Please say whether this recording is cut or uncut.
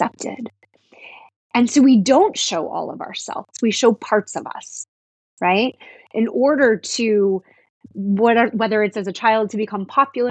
cut